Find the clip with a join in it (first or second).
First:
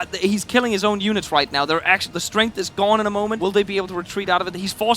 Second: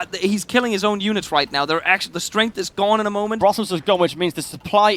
first